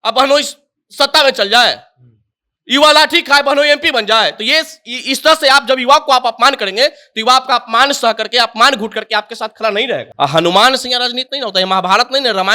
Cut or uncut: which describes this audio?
cut